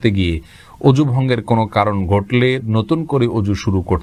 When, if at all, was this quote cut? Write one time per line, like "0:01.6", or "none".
none